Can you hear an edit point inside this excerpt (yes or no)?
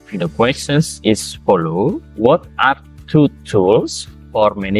yes